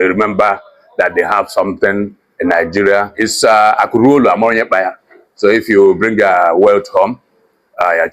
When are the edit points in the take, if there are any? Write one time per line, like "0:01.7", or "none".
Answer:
0:03.1